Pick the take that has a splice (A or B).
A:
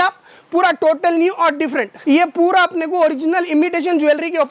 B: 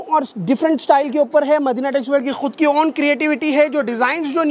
A